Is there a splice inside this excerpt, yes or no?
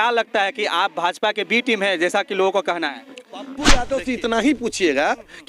yes